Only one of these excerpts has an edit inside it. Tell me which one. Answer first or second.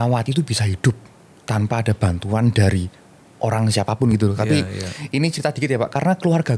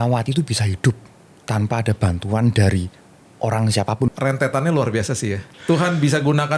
second